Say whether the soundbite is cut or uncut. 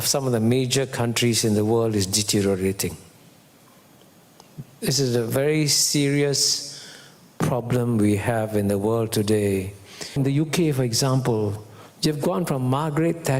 cut